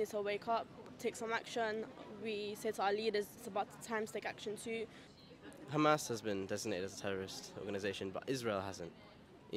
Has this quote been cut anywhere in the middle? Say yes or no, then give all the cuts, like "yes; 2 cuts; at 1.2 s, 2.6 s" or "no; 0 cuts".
no; 0 cuts